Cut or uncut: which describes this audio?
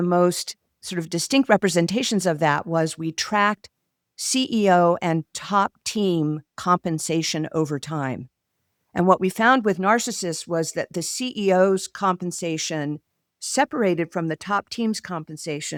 uncut